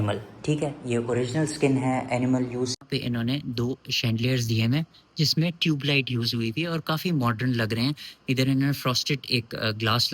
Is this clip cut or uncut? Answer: cut